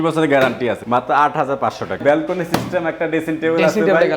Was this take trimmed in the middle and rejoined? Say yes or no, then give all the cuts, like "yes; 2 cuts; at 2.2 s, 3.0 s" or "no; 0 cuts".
yes; 2 cuts; at 0.8 s, 2.0 s